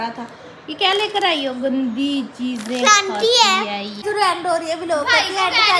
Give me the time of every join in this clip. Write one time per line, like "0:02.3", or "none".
0:04.0